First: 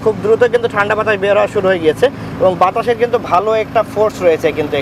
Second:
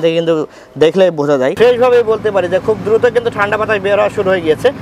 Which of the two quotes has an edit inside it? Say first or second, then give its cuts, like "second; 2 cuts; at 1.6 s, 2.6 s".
second; 1 cut; at 1.5 s